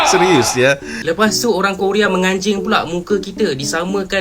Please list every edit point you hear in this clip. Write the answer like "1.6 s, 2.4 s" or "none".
0.9 s